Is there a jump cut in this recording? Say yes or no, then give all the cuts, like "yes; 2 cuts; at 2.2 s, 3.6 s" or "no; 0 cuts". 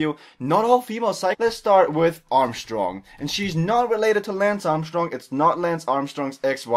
no; 0 cuts